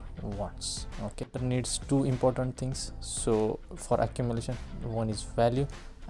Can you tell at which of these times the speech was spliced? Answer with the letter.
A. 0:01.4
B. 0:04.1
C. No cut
A